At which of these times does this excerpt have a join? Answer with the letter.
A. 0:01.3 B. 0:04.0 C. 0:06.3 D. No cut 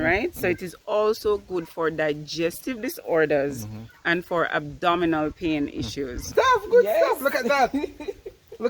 C